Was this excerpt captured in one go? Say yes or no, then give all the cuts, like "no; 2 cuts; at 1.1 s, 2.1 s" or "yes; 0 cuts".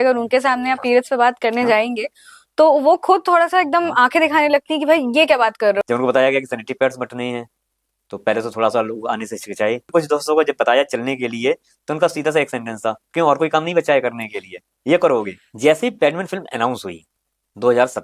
no; 3 cuts; at 5.8 s, 9.9 s, 15.4 s